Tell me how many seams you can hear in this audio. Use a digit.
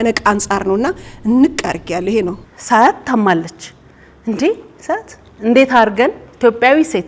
1